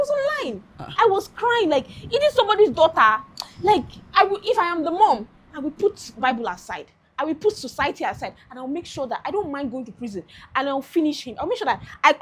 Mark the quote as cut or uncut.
uncut